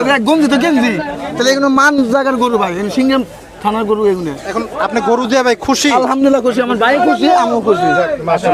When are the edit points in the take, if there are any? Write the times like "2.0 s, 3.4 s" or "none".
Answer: none